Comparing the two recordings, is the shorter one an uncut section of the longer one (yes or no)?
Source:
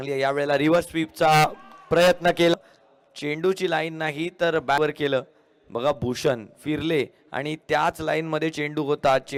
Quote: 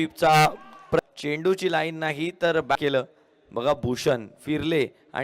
no